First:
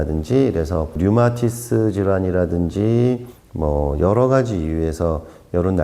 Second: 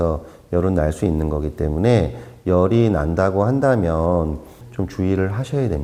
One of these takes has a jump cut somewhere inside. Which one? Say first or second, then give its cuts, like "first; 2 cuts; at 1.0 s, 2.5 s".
first; 2 cuts; at 1.0 s, 3.3 s